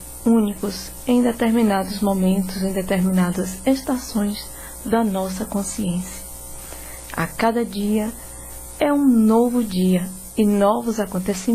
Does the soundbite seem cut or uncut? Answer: uncut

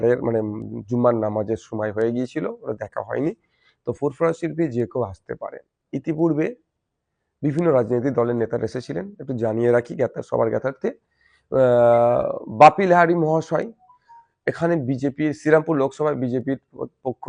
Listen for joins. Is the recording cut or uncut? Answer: uncut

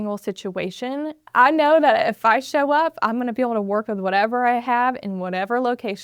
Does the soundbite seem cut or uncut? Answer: cut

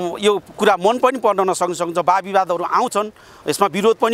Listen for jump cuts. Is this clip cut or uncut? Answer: uncut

